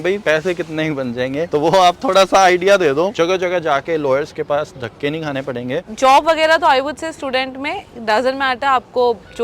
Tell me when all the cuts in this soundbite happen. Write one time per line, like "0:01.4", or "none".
0:03.1
0:05.8